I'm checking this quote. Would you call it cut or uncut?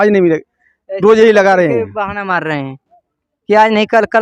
uncut